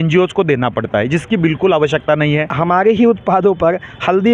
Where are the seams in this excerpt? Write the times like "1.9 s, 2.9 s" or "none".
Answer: 2.5 s